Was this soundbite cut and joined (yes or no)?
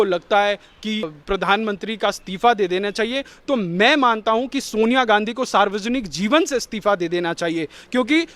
yes